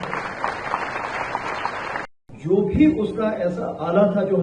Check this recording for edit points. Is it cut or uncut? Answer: cut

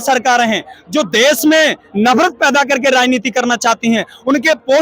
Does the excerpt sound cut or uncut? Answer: uncut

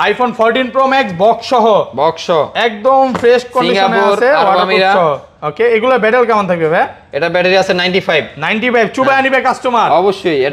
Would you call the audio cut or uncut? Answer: uncut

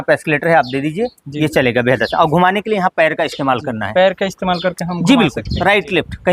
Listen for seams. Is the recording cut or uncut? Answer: uncut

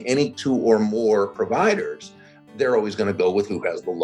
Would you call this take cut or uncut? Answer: uncut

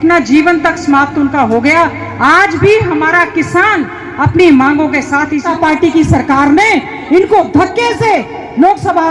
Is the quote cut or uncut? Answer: cut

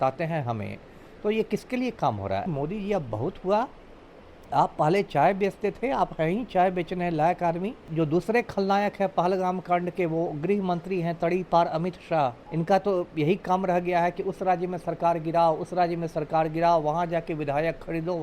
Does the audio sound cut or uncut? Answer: cut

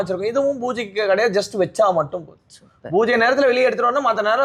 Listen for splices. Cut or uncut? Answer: uncut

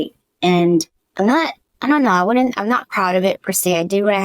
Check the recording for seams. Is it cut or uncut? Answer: cut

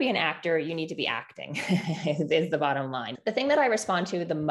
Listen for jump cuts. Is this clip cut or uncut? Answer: cut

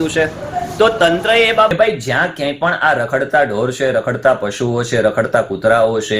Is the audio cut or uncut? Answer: cut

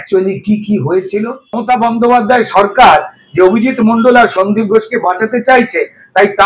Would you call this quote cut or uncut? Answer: cut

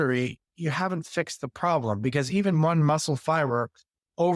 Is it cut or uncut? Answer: uncut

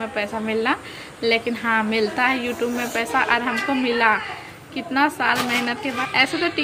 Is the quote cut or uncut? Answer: uncut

